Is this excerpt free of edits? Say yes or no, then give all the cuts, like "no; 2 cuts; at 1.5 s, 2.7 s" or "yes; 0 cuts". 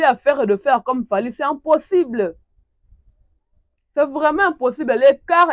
yes; 0 cuts